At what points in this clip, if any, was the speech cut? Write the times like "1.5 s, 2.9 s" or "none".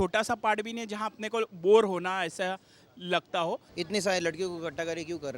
3.7 s